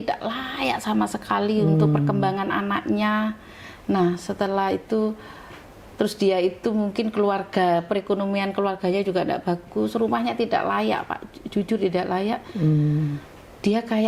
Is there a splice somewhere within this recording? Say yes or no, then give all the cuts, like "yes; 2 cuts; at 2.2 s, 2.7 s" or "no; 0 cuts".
no; 0 cuts